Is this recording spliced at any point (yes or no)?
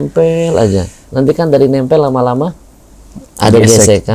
no